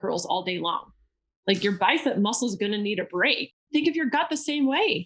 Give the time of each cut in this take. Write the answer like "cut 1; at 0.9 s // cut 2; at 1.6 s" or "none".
cut 1; at 3.5 s